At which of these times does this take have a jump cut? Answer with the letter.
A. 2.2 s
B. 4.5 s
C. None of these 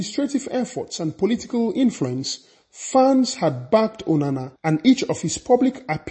B